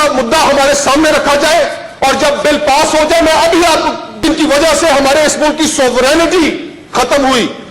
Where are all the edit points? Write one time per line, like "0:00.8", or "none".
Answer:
0:04.1

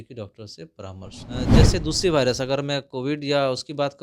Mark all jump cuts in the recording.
0:01.6

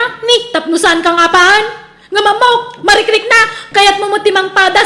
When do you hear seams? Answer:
0:03.5

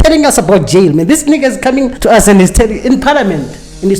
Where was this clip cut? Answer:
0:01.9

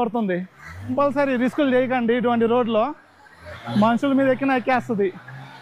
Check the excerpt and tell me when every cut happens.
0:00.9
0:03.5

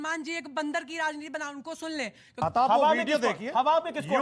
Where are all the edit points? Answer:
0:02.4

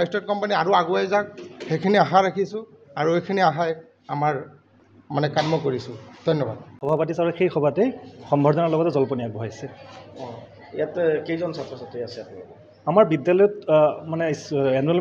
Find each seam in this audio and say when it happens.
0:06.7

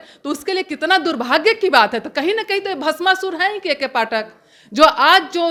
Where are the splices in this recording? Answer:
none

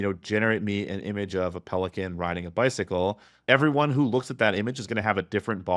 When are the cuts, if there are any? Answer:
0:03.3

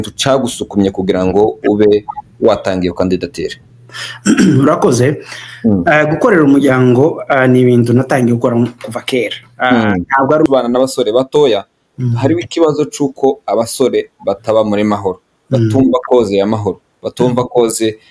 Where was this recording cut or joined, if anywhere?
0:10.5

